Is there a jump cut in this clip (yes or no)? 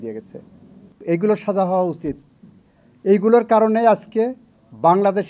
yes